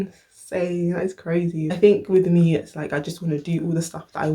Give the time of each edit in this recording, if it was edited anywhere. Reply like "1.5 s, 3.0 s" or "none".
1.7 s